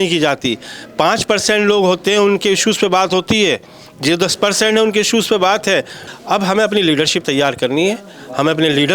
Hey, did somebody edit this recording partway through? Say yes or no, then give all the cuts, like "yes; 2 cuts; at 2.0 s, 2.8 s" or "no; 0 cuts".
yes; 1 cut; at 6.0 s